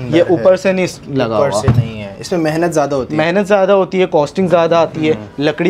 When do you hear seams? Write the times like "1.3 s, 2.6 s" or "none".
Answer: none

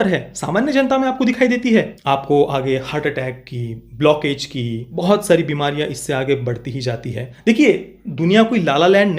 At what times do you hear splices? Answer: 1.9 s, 4.9 s, 7.2 s

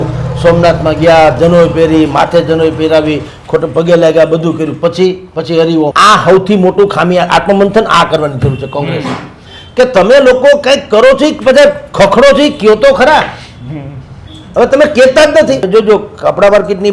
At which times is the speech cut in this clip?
5.9 s, 15.7 s

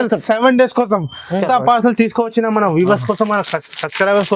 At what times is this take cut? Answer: 1.4 s

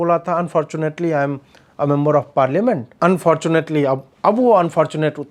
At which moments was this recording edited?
2.9 s

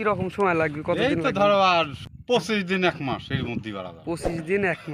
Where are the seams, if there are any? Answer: 2.1 s

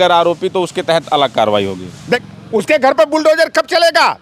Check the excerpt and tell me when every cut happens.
2.2 s

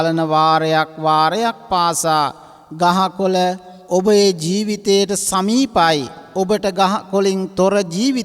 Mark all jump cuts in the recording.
3.7 s, 6.2 s

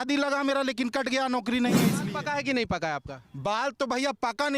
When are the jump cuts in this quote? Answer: 2.0 s

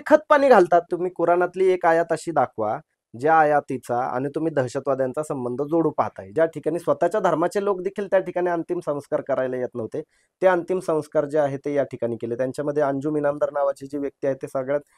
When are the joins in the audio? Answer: 1.0 s, 6.3 s

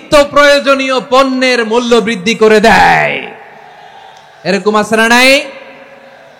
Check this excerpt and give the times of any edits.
none

